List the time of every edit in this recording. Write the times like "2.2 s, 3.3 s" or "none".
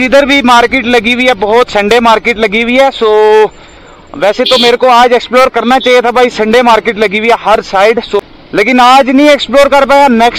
none